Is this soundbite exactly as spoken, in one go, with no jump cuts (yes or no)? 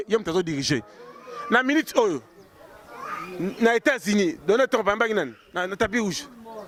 yes